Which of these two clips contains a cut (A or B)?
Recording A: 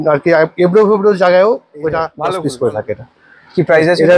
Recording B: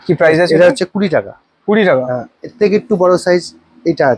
A